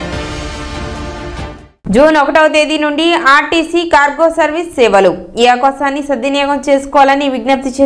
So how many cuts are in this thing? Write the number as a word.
one